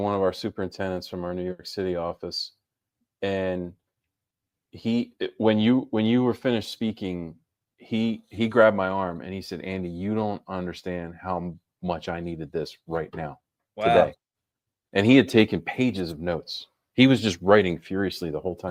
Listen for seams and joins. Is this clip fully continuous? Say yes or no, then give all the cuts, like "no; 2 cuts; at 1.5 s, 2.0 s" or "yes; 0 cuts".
yes; 0 cuts